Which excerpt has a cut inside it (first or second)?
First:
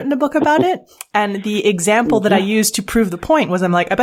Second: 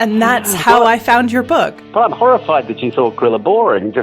second